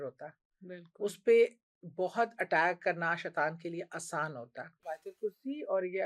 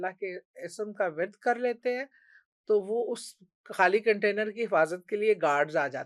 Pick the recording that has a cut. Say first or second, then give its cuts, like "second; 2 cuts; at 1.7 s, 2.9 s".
first; 1 cut; at 4.9 s